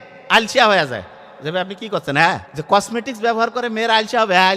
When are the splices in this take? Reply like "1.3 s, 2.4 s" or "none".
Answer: 2.5 s